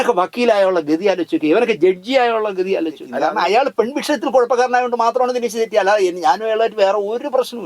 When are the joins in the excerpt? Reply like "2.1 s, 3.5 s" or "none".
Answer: 3.1 s